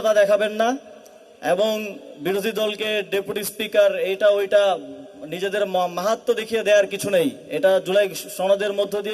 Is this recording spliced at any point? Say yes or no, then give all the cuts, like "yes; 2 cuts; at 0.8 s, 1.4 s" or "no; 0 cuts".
no; 0 cuts